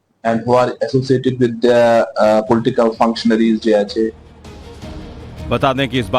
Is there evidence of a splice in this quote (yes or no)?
yes